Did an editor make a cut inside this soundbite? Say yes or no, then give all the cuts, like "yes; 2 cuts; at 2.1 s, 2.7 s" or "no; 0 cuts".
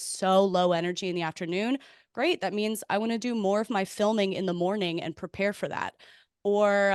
no; 0 cuts